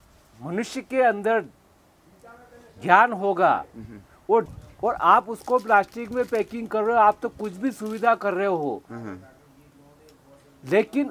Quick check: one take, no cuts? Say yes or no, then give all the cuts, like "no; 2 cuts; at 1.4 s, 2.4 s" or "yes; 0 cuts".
no; 1 cut; at 4.6 s